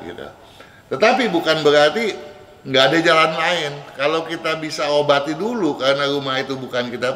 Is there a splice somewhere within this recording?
no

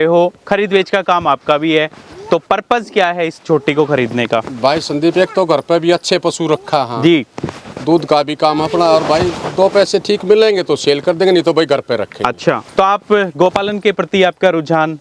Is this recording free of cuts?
yes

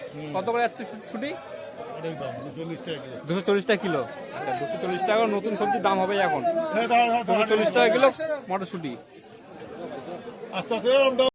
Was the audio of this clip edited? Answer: no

